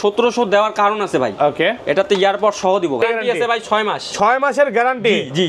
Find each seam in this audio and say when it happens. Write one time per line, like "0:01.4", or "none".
0:03.0